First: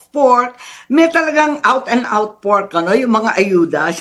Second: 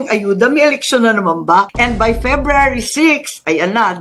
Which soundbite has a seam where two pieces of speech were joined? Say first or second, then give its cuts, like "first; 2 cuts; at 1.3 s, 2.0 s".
second; 1 cut; at 1.7 s